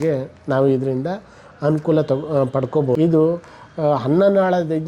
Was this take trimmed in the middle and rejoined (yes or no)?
yes